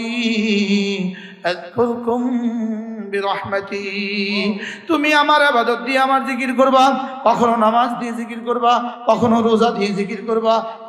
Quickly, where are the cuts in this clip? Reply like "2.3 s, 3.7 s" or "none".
none